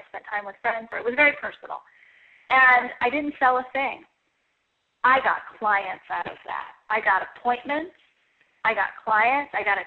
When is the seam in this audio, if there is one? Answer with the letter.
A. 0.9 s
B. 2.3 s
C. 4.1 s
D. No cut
A